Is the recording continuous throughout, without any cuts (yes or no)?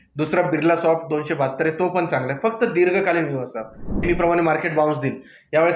no